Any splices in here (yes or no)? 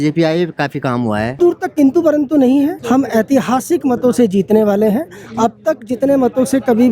yes